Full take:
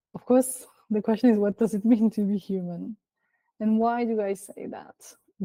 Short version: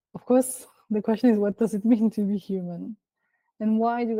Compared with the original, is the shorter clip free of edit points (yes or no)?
yes